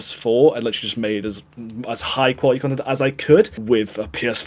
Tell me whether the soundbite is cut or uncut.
uncut